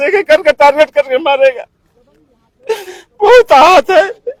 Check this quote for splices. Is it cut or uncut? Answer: uncut